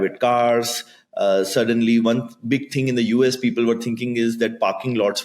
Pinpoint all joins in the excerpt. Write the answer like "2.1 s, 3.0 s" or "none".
none

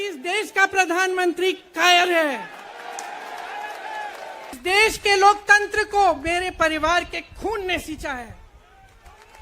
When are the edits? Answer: 4.6 s

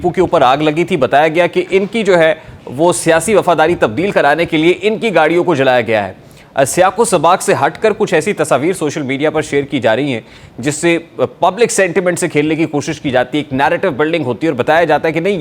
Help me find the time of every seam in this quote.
none

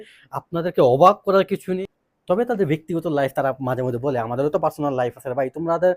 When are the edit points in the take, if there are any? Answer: 1.7 s

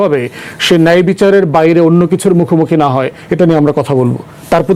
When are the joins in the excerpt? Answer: none

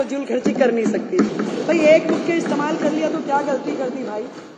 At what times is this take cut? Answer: 1.2 s

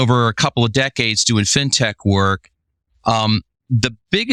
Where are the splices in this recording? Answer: none

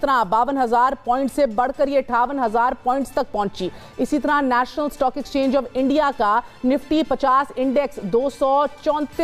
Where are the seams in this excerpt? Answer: none

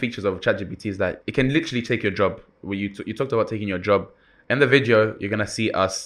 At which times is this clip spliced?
1.2 s

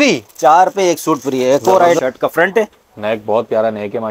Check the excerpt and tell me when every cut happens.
2.0 s

